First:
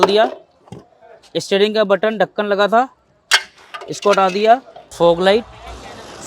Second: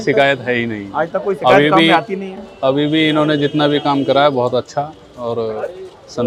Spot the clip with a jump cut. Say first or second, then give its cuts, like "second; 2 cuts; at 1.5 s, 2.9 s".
first; 1 cut; at 4.8 s